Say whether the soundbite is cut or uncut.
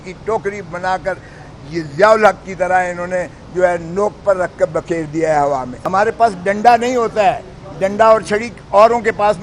cut